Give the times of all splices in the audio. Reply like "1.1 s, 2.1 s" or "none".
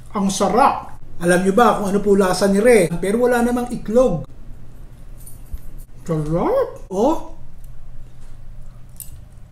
3.0 s, 6.9 s